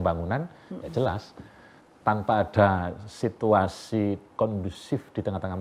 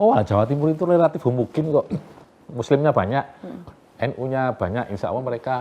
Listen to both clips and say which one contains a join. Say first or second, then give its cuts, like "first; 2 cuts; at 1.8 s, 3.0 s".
second; 1 cut; at 2.0 s